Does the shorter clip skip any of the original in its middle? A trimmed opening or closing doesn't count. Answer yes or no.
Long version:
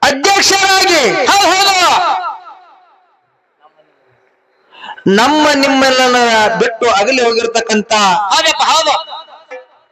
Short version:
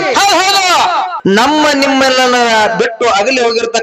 yes